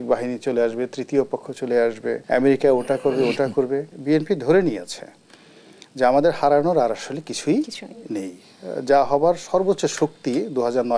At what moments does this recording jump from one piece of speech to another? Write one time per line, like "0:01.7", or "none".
0:02.2
0:03.9